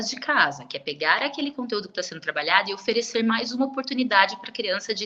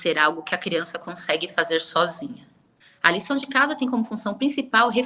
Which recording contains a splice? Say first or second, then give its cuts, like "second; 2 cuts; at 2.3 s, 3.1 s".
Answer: second; 1 cut; at 2.4 s